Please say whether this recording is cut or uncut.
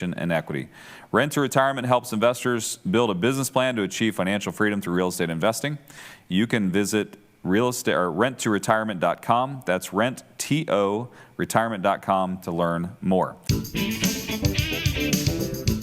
cut